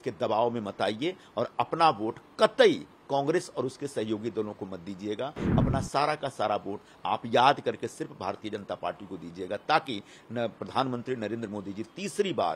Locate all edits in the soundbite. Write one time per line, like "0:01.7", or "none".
none